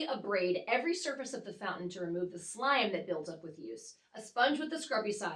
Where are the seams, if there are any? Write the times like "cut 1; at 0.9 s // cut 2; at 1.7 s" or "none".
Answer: none

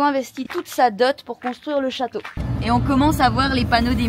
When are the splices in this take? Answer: cut 1; at 2.4 s

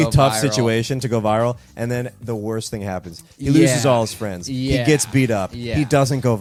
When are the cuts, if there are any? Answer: none

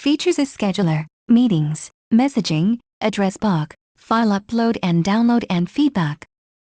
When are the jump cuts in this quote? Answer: cut 1; at 1.1 s

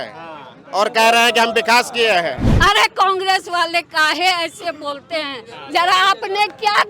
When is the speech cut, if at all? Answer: cut 1; at 2.5 s

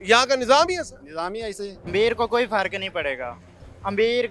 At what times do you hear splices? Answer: cut 1; at 1.8 s

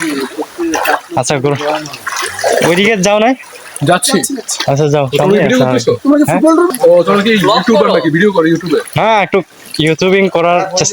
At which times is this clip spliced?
cut 1; at 6.7 s

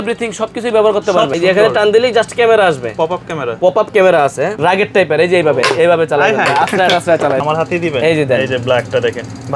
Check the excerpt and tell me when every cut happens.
cut 1; at 1.3 s // cut 2; at 4.6 s // cut 3; at 7.4 s

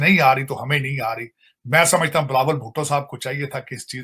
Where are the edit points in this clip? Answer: none

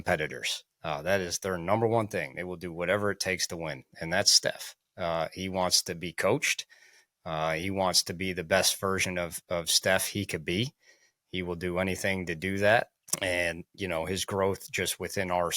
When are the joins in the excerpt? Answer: cut 1; at 13.0 s

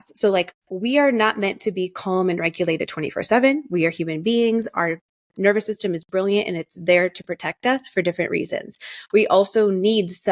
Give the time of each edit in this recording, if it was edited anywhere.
none

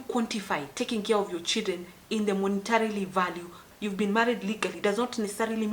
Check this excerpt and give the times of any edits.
cut 1; at 3.6 s

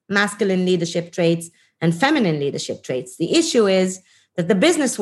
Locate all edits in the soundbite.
none

